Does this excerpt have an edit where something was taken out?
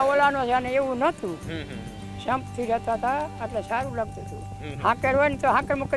no; 0 cuts

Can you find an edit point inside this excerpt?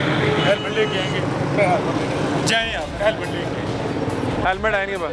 no; 0 cuts

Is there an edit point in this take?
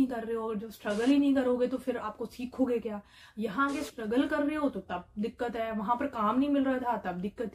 no; 0 cuts

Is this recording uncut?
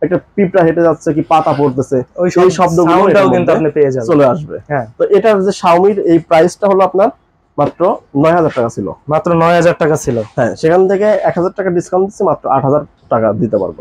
yes; 0 cuts

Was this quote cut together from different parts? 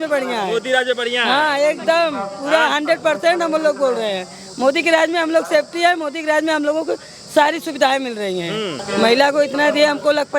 yes; 1 cut; at 8.8 s

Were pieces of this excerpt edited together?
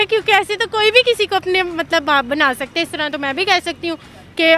no; 0 cuts

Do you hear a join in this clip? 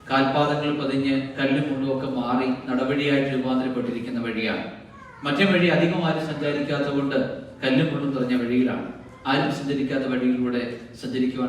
yes; 1 cut; at 9.1 s

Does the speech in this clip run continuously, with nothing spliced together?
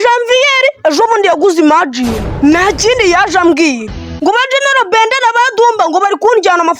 yes; 0 cuts

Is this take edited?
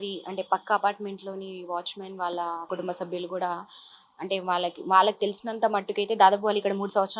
yes; 1 cut; at 2.7 s

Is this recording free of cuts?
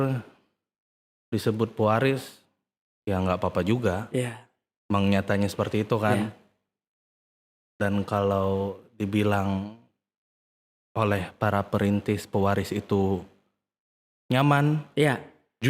yes; 0 cuts

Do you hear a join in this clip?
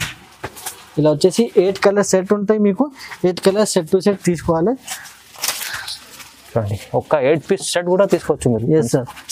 no; 0 cuts

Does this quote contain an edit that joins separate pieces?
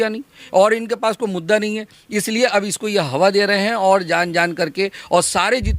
no; 0 cuts

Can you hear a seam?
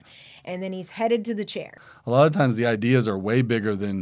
yes; 1 cut; at 1.9 s

